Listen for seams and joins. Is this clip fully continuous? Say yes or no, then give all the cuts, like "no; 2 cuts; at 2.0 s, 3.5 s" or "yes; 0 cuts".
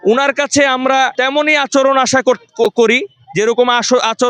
no; 1 cut; at 1.1 s